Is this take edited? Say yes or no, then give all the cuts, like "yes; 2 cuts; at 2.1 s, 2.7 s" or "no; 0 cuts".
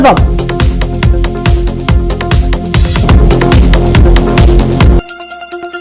no; 0 cuts